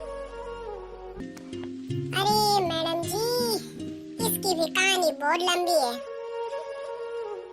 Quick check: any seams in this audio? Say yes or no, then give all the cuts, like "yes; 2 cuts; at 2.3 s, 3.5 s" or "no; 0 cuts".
yes; 1 cut; at 1.3 s